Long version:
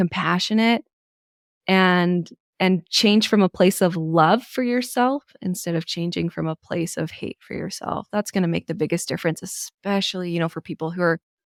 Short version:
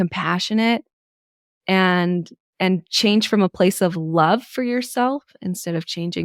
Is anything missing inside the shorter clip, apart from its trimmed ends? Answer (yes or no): no